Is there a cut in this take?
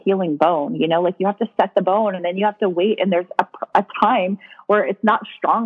no; 0 cuts

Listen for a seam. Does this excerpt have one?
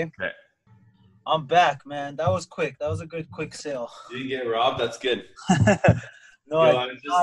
no; 0 cuts

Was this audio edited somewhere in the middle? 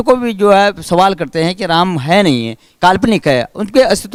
no; 0 cuts

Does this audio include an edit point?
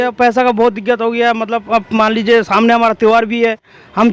no; 0 cuts

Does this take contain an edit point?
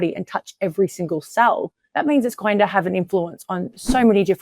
yes; 1 cut; at 1.8 s

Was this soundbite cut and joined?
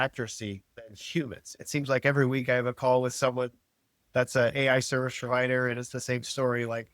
yes; 1 cut; at 1.5 s

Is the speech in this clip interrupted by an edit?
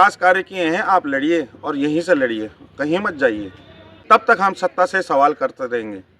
yes; 1 cut; at 3.9 s

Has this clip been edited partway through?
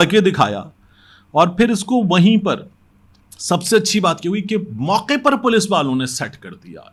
no; 0 cuts

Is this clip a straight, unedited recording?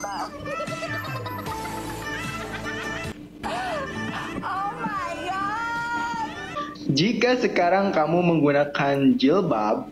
no; 2 cuts; at 3.3 s, 6.7 s

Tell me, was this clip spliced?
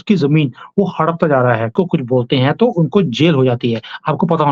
yes; 1 cut; at 1.7 s

